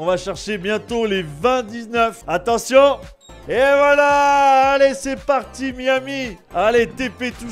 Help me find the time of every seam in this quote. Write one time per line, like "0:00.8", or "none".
0:02.2
0:06.4